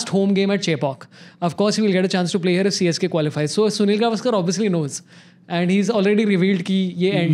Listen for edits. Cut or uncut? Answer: uncut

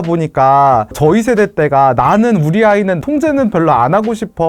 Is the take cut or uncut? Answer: uncut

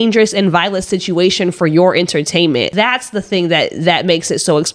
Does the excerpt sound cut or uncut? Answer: cut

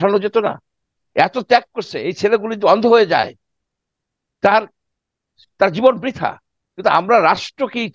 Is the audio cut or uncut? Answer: uncut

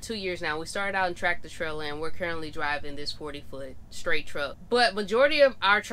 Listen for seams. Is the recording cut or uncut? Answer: cut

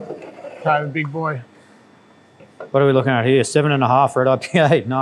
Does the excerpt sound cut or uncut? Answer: uncut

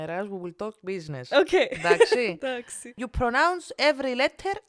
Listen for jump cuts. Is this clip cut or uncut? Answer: cut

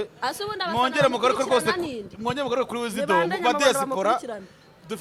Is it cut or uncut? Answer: uncut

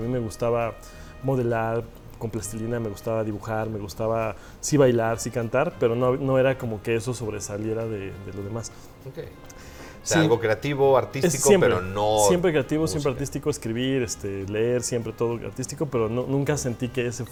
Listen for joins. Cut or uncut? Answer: uncut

